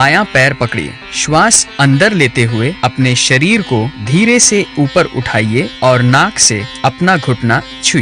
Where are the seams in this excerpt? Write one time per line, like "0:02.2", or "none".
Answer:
0:04.0
0:05.7
0:06.7